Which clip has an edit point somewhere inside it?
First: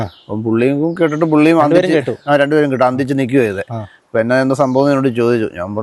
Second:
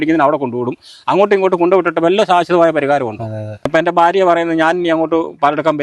second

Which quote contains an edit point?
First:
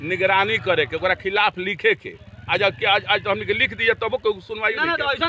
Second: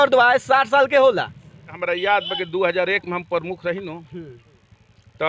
second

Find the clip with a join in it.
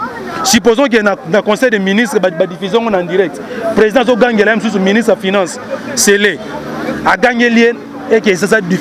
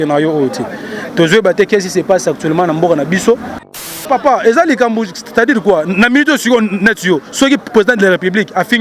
second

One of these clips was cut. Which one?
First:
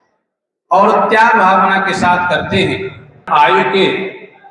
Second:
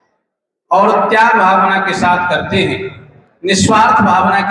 first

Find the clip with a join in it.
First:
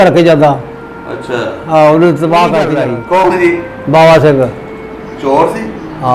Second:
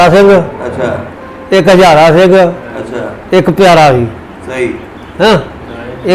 first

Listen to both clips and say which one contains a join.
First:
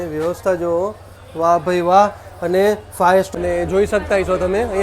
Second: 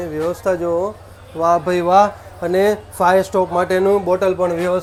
first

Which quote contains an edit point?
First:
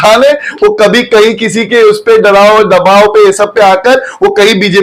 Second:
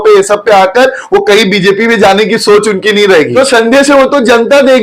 second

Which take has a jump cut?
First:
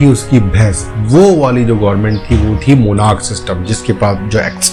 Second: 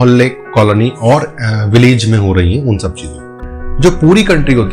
second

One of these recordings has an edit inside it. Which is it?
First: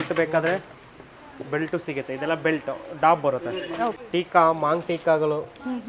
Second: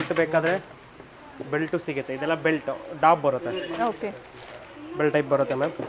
first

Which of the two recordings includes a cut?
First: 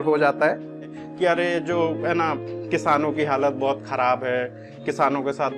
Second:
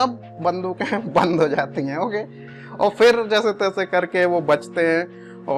first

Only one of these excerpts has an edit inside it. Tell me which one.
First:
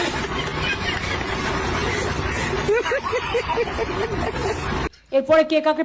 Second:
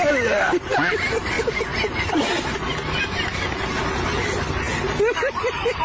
first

